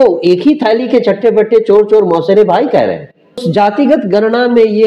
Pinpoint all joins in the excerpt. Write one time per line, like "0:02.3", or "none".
0:03.4